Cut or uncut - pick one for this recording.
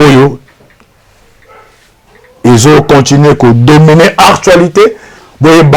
uncut